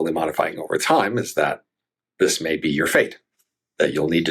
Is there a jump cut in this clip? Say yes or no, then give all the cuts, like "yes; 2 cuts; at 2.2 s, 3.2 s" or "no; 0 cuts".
no; 0 cuts